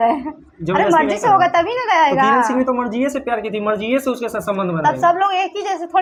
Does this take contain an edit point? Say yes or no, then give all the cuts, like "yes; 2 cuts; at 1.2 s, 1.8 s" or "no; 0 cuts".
no; 0 cuts